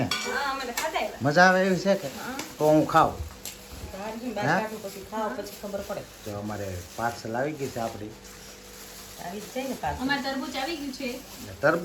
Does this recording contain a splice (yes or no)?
no